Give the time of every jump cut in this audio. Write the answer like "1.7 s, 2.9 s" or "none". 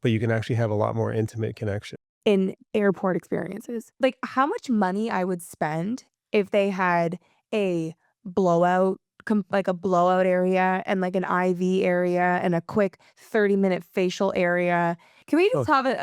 2.1 s, 15.1 s